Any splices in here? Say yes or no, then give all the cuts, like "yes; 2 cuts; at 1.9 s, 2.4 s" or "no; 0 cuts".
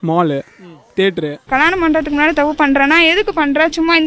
yes; 1 cut; at 1.5 s